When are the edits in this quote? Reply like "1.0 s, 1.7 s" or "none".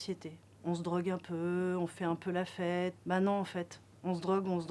3.0 s